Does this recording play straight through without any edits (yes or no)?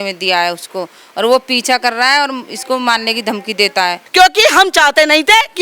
no